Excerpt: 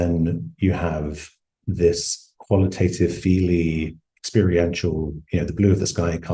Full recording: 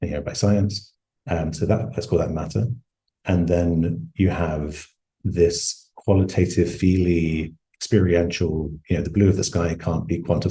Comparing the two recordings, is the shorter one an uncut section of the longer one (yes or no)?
yes